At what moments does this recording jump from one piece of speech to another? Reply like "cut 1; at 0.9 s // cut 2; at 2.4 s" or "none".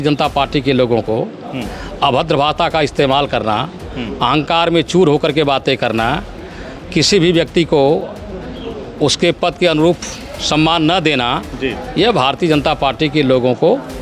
none